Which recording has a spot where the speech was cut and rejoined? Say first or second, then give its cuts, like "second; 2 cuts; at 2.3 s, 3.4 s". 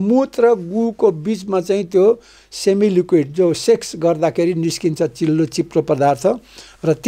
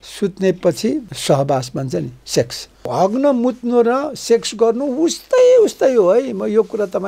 second; 2 cuts; at 1.1 s, 2.8 s